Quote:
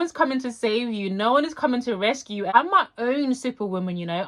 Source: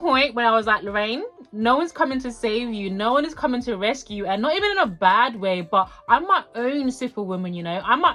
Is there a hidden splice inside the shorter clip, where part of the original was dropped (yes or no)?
yes